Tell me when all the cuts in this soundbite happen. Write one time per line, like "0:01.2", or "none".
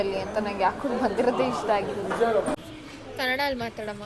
0:02.6